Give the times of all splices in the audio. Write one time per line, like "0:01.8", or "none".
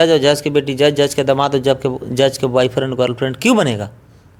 none